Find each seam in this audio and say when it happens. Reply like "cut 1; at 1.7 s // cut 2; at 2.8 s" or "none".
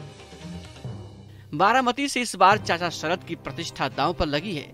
cut 1; at 1.5 s